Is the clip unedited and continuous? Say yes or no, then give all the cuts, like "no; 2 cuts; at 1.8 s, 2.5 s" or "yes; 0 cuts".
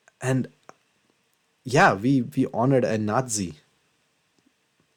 yes; 0 cuts